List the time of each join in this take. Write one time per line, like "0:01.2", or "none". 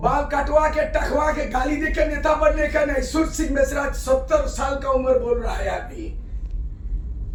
none